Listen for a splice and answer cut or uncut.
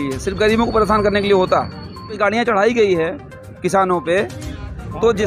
cut